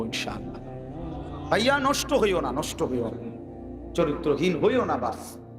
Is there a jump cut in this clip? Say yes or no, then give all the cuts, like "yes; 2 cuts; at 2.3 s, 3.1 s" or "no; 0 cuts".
no; 0 cuts